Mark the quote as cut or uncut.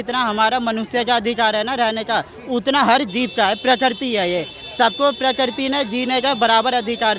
uncut